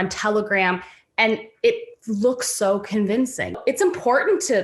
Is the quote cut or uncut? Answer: cut